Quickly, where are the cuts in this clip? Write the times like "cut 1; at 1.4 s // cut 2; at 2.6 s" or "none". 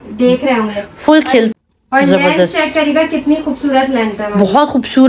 cut 1; at 1.5 s